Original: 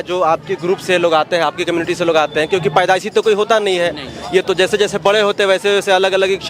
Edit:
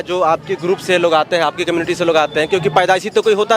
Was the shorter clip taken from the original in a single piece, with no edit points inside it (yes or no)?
yes